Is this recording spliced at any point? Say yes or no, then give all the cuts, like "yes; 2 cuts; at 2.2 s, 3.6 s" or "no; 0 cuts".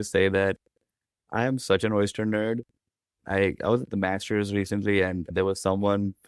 no; 0 cuts